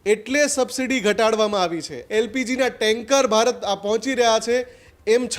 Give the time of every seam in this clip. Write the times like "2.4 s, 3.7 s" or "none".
1.9 s